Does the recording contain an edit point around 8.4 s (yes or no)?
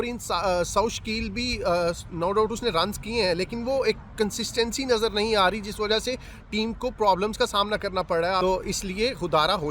yes